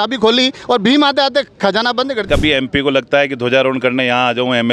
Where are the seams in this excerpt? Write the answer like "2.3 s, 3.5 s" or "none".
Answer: 2.3 s

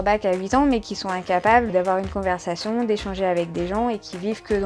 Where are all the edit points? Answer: 1.7 s

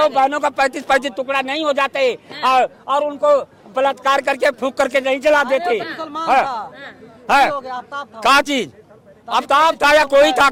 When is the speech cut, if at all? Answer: none

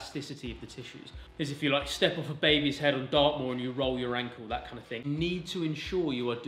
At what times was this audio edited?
1.1 s, 5.0 s

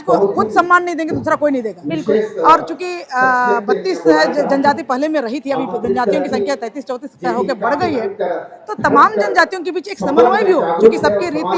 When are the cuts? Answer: none

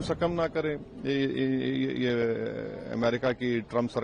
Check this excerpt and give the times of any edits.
none

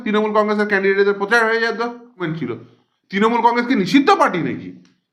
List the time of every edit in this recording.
2.3 s

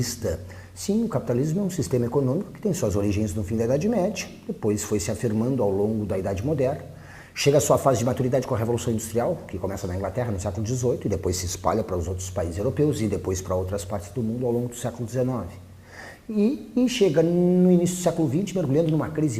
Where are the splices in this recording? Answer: 3.8 s

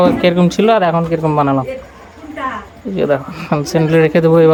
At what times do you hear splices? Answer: none

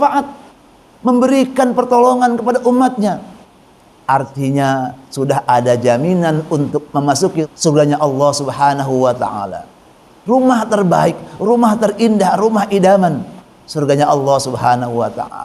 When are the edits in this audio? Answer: 7.4 s

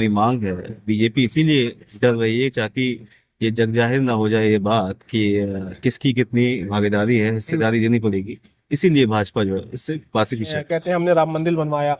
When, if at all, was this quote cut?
10.5 s

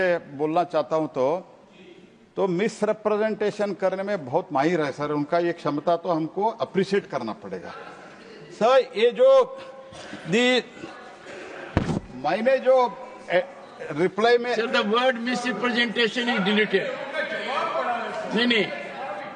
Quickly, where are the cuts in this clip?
none

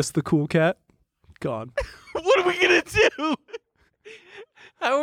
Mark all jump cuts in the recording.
1.7 s

